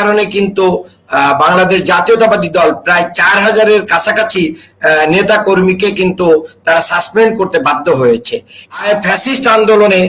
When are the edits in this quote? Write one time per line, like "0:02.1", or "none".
0:08.8